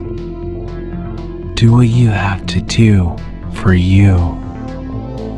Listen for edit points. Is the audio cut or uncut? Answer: cut